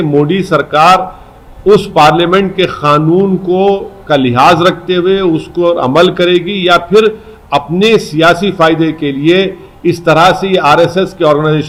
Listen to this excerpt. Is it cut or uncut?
uncut